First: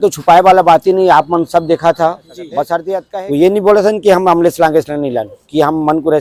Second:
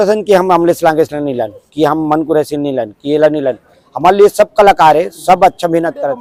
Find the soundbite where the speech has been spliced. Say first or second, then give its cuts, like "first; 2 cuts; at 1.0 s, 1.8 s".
first; 1 cut; at 2.9 s